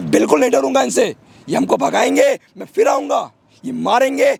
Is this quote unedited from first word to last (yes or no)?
yes